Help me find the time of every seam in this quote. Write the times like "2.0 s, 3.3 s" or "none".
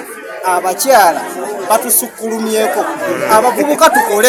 none